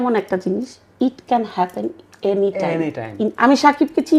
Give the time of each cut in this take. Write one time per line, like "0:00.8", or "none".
0:03.2

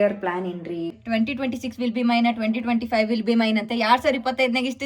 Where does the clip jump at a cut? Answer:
0:01.0

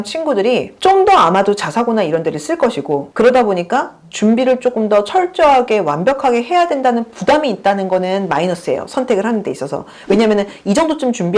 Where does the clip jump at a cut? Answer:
none

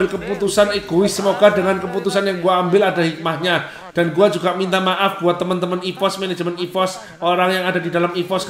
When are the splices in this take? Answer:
none

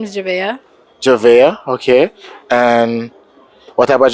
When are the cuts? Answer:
none

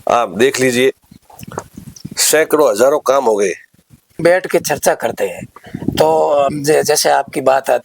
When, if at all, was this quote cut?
0:04.2

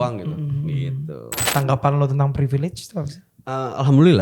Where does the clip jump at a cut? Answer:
0:01.5

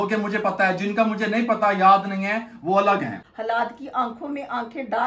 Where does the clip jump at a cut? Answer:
0:03.3

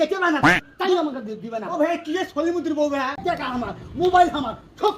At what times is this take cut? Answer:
0:03.2

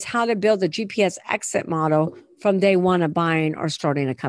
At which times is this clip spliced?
none

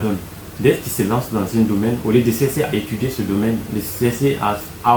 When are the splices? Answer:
none

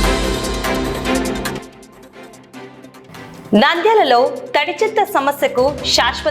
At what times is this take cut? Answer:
0:01.6
0:03.0

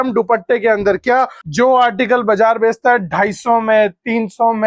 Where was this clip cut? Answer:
0:01.4

